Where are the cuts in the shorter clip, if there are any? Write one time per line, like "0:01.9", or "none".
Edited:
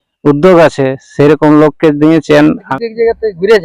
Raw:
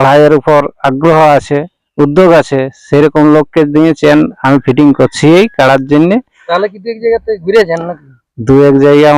0:02.7